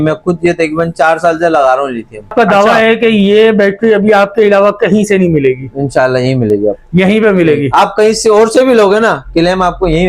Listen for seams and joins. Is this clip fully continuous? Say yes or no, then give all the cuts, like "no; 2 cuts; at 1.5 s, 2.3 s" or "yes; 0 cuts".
no; 1 cut; at 2.3 s